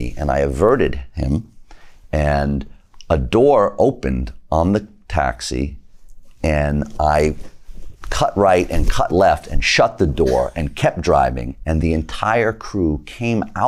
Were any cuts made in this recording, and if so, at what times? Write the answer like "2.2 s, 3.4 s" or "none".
none